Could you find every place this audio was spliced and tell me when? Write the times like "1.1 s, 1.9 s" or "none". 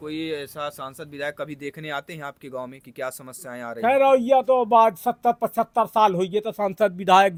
none